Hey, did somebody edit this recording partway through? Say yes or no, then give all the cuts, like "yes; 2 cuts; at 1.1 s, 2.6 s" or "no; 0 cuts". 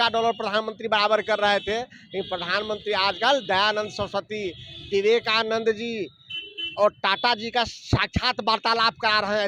no; 0 cuts